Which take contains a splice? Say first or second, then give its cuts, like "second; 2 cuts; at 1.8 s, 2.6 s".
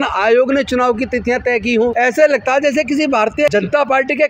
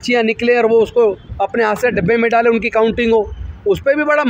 first; 2 cuts; at 1.9 s, 3.5 s